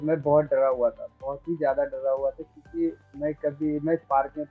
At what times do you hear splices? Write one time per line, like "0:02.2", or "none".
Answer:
none